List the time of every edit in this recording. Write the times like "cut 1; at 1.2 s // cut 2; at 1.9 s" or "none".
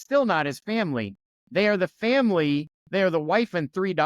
cut 1; at 2.8 s

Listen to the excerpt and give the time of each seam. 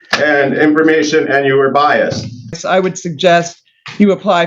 cut 1; at 2.6 s

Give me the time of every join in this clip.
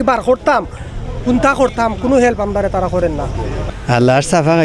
cut 1; at 3.6 s

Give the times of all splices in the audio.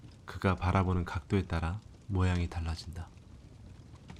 none

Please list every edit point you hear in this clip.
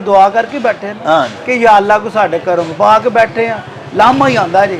none

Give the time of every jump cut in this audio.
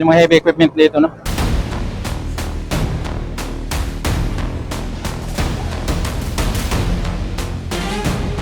cut 1; at 1.3 s

